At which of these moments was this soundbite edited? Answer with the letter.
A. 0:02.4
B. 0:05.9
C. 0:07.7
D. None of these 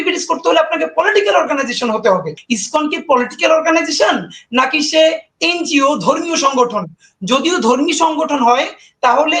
A